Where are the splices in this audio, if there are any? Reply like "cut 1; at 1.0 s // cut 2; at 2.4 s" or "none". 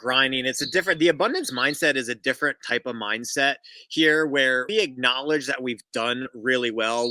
cut 1; at 4.7 s